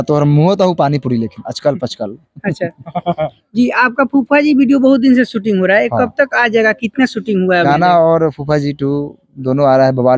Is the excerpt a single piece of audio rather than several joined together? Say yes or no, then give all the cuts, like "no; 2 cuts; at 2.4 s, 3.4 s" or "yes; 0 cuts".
no; 2 cuts; at 3.4 s, 7.7 s